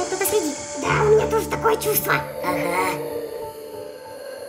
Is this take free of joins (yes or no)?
yes